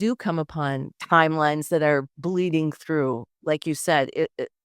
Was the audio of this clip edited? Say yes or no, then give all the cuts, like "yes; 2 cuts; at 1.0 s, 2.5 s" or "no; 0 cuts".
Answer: yes; 1 cut; at 1.0 s